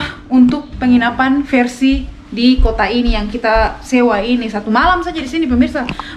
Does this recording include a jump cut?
no; 0 cuts

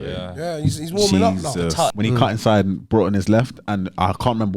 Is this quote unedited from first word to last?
no; 1 cut; at 2.0 s

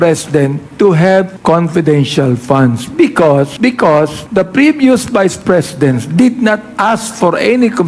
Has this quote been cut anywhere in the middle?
yes; 2 cuts; at 1.3 s, 4.0 s

